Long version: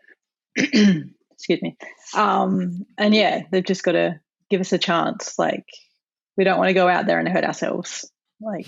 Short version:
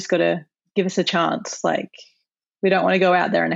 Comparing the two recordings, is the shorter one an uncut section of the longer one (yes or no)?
yes